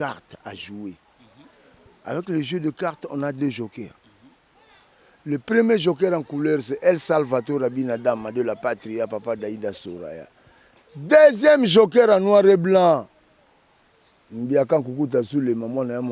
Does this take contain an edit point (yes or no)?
no